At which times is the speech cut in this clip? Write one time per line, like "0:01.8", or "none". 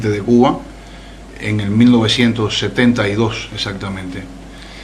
none